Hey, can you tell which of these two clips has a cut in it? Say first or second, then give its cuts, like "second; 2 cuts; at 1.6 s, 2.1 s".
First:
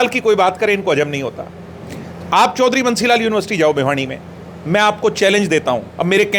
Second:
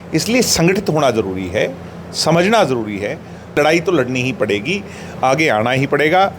second; 1 cut; at 3.5 s